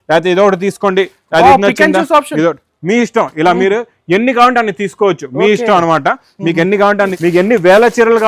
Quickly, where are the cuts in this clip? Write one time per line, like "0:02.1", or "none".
0:07.2